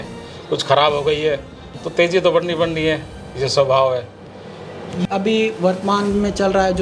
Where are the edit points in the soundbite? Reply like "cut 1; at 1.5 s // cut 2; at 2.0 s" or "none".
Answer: cut 1; at 5.1 s